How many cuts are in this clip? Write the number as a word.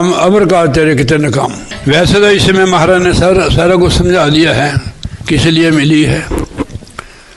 one